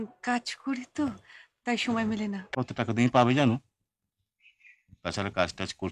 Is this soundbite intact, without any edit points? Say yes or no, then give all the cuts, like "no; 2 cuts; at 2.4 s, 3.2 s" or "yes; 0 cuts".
no; 1 cut; at 2.5 s